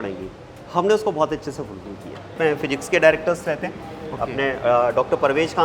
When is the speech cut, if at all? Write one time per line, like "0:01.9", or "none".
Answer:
0:02.3